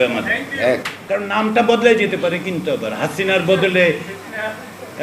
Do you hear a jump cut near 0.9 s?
yes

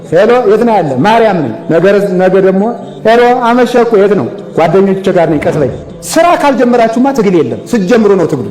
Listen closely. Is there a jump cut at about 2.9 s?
no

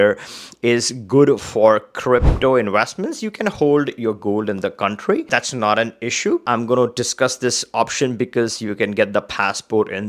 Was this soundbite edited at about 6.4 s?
yes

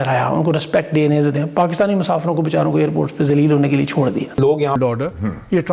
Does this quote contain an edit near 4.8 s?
yes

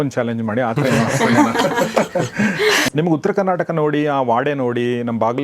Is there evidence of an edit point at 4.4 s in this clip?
no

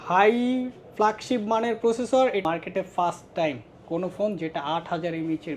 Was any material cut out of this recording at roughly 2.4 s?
yes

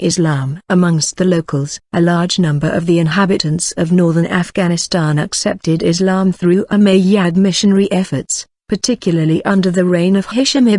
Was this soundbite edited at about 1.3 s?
yes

